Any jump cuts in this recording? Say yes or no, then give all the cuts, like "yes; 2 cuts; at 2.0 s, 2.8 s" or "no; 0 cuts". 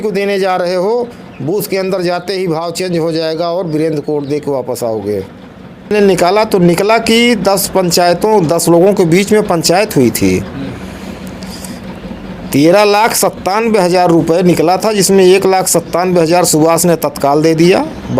yes; 1 cut; at 5.9 s